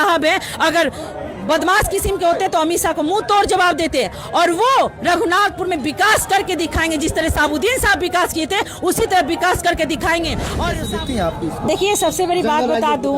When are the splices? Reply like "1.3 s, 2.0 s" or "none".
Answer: 10.5 s